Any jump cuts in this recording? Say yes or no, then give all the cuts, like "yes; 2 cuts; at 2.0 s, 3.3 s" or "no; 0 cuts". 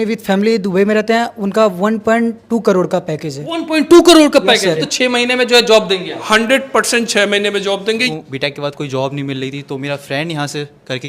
yes; 2 cuts; at 4.8 s, 8.1 s